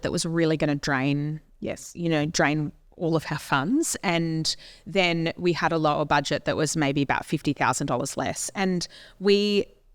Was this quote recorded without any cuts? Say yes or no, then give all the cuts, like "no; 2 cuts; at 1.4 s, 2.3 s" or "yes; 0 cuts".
yes; 0 cuts